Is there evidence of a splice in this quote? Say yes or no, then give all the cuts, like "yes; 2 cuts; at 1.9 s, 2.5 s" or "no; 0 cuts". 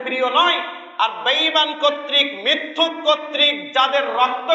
no; 0 cuts